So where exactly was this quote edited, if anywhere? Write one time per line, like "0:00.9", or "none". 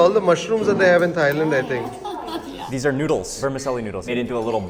0:02.6